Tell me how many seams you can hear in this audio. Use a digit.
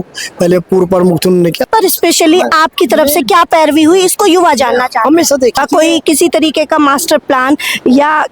2